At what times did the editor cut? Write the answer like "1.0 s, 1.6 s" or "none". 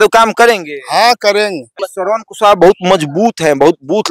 1.8 s

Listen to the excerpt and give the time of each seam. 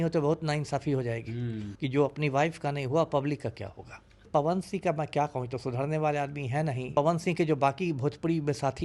1.6 s, 4.3 s, 6.9 s

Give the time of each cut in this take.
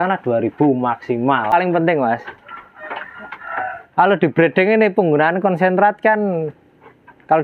1.5 s

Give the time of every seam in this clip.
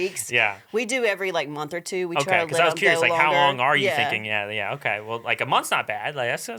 none

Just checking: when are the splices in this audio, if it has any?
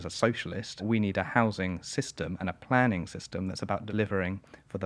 0.8 s, 3.9 s

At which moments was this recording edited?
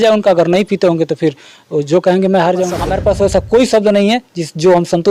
2.9 s

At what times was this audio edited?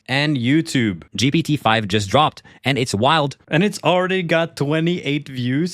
3.4 s

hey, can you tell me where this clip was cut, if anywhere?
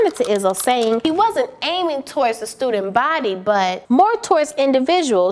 1.0 s, 3.8 s

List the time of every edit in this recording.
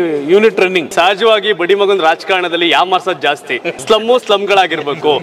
0.9 s, 3.7 s

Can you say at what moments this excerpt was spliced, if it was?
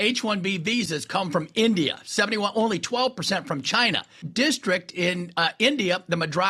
4.3 s

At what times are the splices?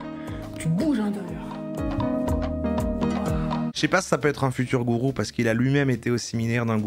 3.7 s

